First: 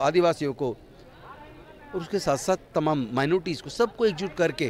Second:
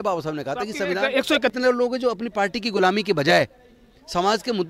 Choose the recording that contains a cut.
second; 1 cut; at 1.5 s

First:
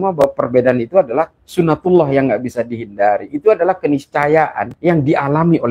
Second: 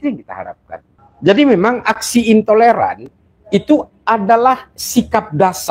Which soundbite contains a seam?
first; 1 cut; at 4.7 s

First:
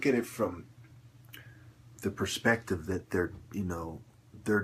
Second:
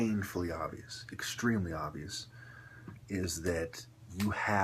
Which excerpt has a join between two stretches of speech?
second; 1 cut; at 3.5 s

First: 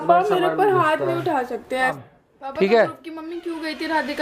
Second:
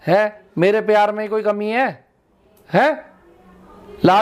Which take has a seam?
first; 1 cut; at 2.0 s

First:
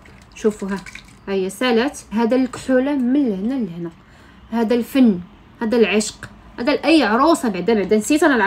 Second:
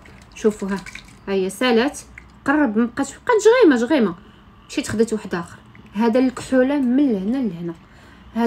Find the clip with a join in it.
first; 1 cut; at 2.0 s

